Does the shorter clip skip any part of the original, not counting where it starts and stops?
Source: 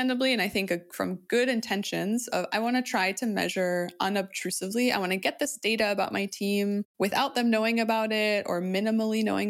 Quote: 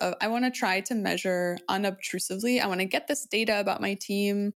no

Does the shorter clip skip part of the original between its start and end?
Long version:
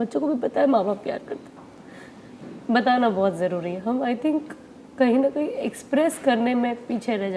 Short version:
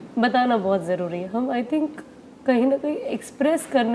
no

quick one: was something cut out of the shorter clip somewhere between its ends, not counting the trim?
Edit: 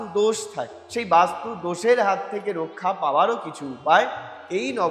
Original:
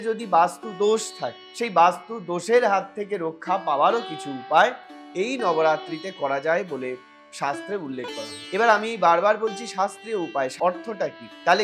no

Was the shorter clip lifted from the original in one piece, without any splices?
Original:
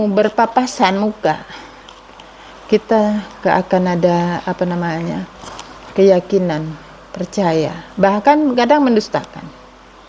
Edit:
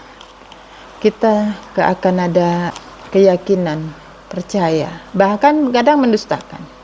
no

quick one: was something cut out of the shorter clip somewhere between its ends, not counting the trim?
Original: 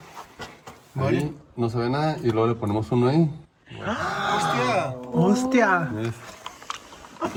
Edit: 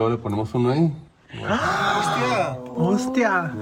no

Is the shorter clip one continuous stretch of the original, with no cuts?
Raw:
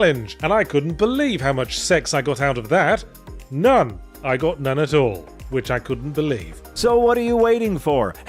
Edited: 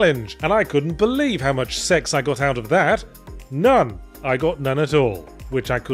yes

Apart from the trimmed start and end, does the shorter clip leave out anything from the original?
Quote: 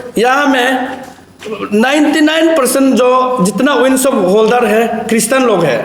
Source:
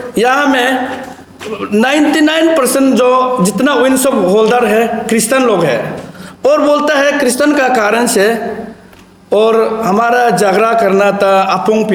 no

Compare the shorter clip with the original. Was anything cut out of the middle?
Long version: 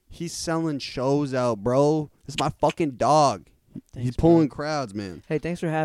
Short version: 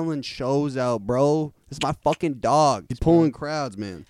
yes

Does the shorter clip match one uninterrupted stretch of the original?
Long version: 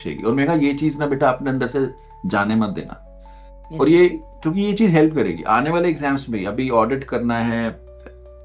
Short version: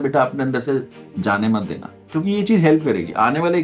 no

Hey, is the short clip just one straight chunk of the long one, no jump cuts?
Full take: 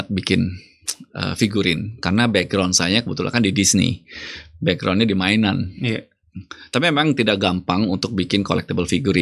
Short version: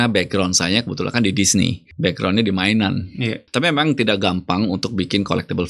no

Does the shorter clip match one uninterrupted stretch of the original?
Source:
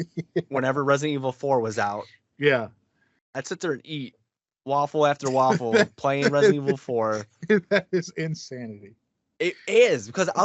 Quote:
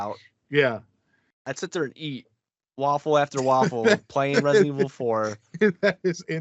yes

